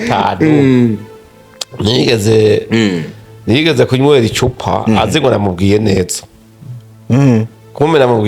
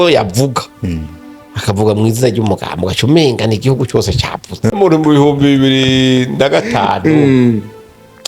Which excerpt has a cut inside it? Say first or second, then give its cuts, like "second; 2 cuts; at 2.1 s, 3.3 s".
second; 1 cut; at 4.7 s